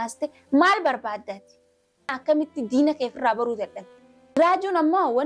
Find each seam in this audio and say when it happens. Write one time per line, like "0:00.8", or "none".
0:02.1
0:04.4

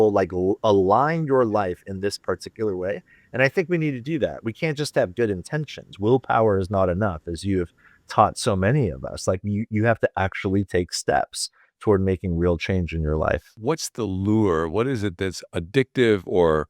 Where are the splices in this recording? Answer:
0:13.6

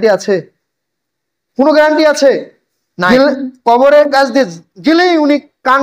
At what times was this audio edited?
0:03.1

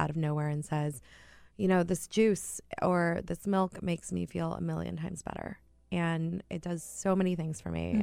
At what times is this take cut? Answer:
none

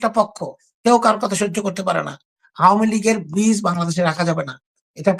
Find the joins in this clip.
0:02.4

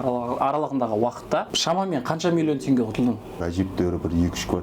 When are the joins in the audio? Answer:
0:01.5
0:03.4

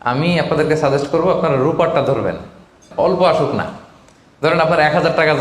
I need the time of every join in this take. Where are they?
0:02.9

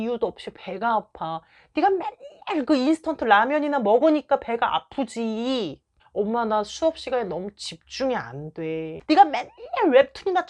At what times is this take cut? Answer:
0:08.9

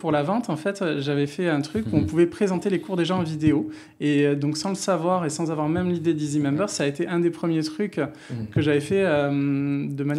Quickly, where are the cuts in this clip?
none

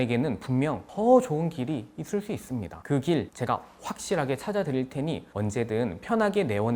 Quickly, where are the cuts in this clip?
none

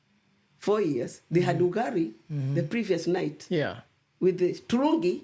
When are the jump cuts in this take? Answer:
none

